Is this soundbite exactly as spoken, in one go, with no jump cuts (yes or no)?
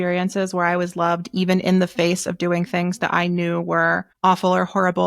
no